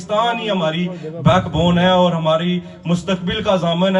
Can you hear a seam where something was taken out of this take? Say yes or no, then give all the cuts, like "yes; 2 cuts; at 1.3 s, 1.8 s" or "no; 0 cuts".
no; 0 cuts